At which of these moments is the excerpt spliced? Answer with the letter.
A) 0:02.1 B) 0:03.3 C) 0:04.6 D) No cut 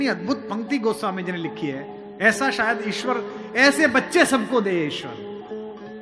D